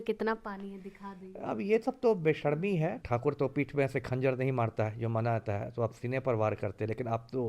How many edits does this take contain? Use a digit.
1